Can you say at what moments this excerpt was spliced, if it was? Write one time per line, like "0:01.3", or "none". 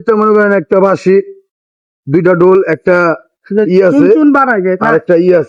none